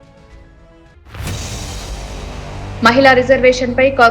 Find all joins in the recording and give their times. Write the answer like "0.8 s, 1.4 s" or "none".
0.9 s, 2.7 s